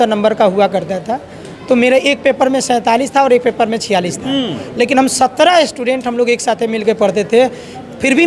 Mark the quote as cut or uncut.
uncut